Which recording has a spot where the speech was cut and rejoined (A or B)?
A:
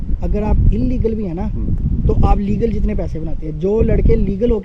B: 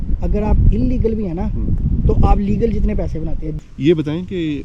B